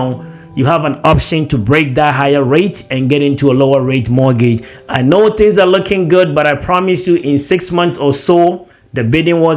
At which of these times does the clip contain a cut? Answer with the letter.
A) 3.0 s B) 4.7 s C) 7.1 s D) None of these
B